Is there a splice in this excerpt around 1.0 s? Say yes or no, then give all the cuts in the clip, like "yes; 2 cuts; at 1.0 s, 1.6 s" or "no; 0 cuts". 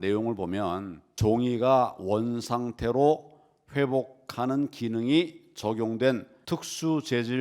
yes; 2 cuts; at 1.0 s, 6.3 s